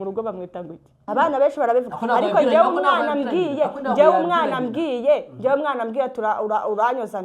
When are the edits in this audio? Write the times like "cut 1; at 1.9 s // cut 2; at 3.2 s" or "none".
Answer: cut 1; at 1.0 s

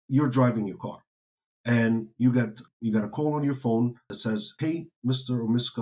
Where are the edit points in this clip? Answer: cut 1; at 2.6 s // cut 2; at 4.1 s

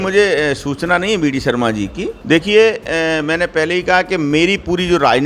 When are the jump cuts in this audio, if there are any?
cut 1; at 2.1 s

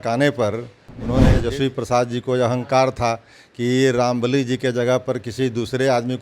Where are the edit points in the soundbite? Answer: cut 1; at 1.3 s

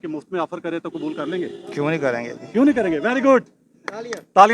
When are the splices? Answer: none

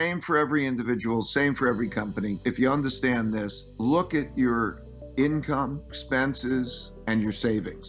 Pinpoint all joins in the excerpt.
cut 1; at 2.4 s // cut 2; at 3.6 s // cut 3; at 6.0 s // cut 4; at 6.9 s

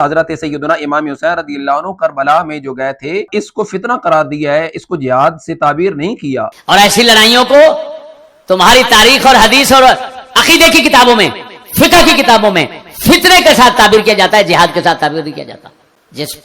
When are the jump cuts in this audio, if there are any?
cut 1; at 3.3 s // cut 2; at 6.6 s

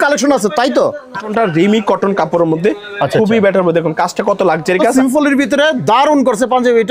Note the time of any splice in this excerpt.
cut 1; at 1.2 s // cut 2; at 4.9 s

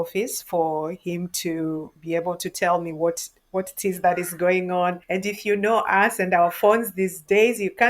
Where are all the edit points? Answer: cut 1; at 5.0 s

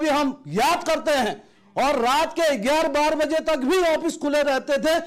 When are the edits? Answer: none

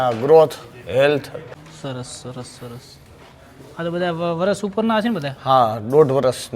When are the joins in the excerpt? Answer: cut 1; at 1.6 s

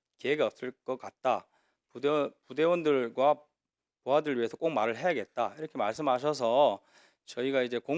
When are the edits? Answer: none

